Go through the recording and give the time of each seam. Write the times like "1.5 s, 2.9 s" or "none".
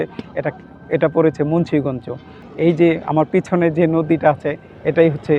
2.4 s

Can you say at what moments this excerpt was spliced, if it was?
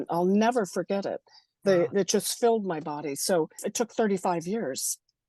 3.6 s

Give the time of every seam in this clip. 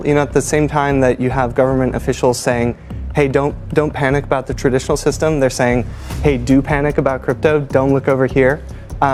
none

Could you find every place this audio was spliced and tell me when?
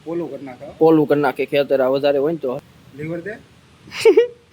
2.6 s

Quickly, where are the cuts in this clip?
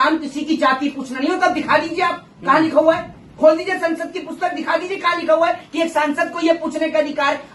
none

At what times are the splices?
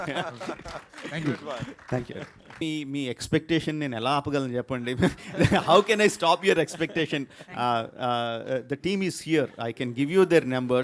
2.6 s

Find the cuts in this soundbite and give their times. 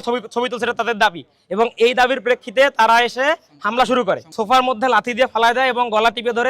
4.3 s

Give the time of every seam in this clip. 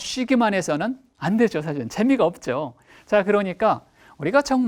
1.1 s

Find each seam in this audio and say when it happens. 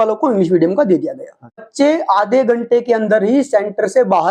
1.7 s

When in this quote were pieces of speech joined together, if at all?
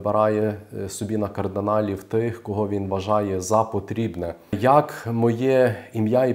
4.6 s

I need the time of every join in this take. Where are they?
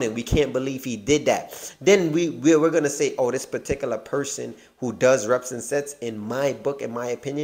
none

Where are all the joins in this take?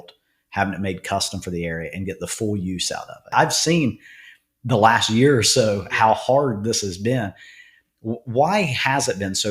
3.3 s

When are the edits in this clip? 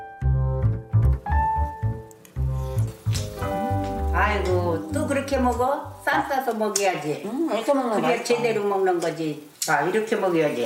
none

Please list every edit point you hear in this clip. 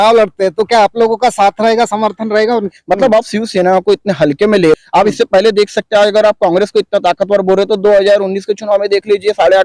2.7 s, 4.8 s

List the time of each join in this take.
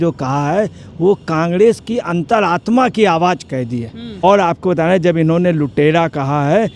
4.1 s

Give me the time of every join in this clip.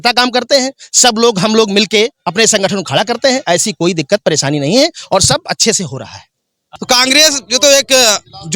6.7 s

